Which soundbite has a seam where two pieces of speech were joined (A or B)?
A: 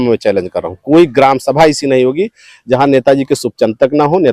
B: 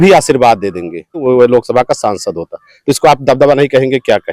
B